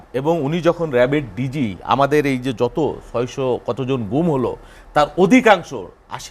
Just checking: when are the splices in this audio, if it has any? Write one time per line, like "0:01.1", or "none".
none